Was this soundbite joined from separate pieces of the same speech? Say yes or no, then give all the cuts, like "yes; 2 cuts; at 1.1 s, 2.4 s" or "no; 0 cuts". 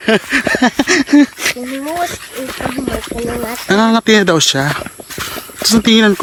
no; 0 cuts